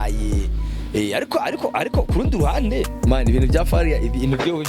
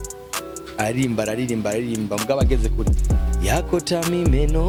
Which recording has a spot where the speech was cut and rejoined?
first; 1 cut; at 2.9 s

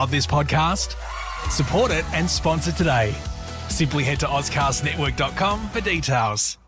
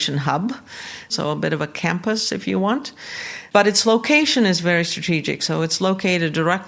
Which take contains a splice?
second; 2 cuts; at 1.1 s, 3.3 s

